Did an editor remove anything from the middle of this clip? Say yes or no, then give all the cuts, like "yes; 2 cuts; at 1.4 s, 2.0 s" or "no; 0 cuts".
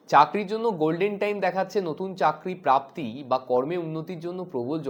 no; 0 cuts